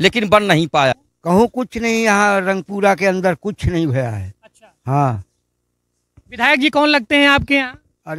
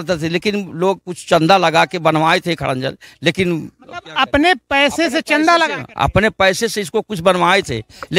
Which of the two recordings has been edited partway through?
first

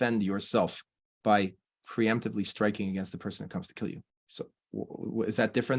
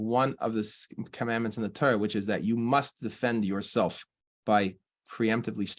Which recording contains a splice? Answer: first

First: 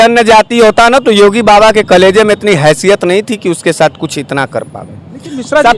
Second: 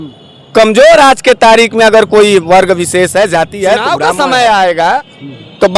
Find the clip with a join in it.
second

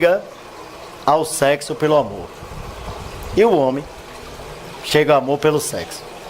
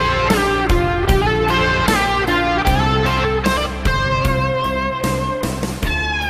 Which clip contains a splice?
first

